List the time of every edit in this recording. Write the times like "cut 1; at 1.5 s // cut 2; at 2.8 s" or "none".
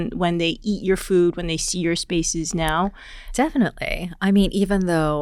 none